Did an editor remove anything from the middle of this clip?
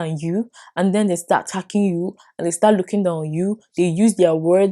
no; 0 cuts

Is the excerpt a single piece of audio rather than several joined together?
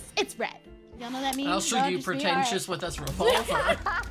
yes; 0 cuts

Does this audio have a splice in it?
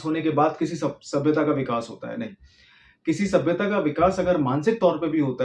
no; 0 cuts

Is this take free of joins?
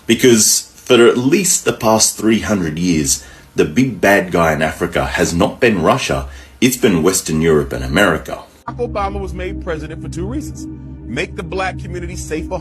no; 1 cut; at 8.7 s

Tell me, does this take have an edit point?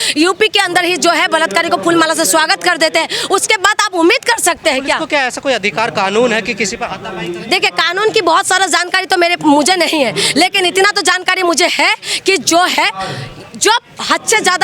no; 0 cuts

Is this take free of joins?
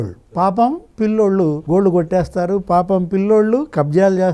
yes; 0 cuts

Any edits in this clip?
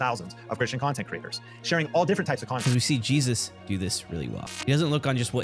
yes; 2 cuts; at 2.6 s, 4.5 s

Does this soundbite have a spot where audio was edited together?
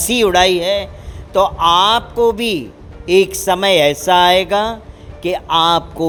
no; 0 cuts

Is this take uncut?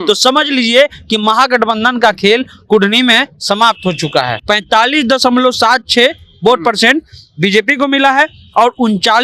no; 1 cut; at 4.3 s

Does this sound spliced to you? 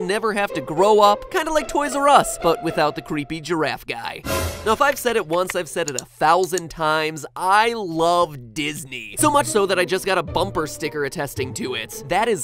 yes; 1 cut; at 1.5 s

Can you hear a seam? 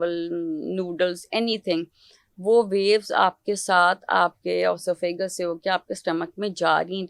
no; 0 cuts

